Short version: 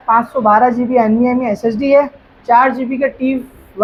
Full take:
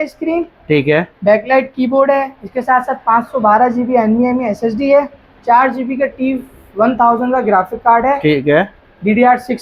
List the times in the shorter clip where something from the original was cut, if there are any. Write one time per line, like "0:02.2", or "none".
none